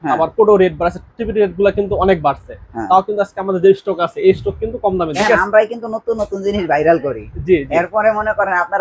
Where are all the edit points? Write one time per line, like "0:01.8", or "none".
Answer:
0:05.1